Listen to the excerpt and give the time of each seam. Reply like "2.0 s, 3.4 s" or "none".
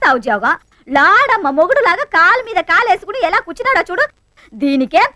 none